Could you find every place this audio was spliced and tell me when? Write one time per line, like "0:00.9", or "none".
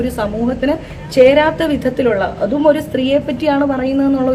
none